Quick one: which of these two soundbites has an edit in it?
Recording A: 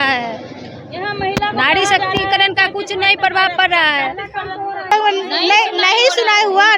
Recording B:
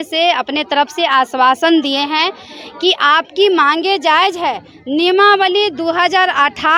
A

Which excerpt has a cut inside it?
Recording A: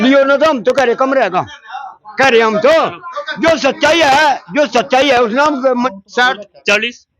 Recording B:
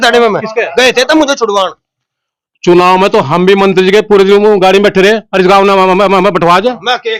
A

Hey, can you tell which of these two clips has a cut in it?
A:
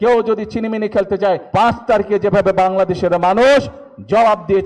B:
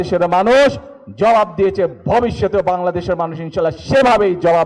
A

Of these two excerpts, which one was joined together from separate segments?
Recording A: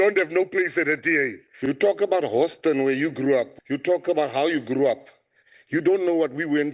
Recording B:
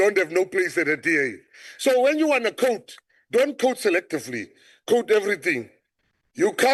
A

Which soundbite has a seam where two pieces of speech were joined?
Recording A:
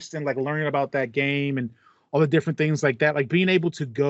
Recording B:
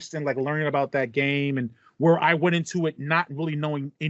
B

